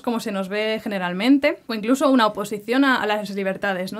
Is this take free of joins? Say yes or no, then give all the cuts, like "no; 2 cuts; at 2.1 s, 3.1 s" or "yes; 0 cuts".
no; 1 cut; at 1.7 s